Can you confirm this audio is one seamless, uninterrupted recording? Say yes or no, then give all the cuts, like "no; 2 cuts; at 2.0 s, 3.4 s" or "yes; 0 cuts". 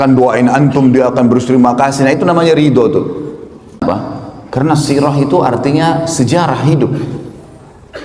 no; 1 cut; at 3.8 s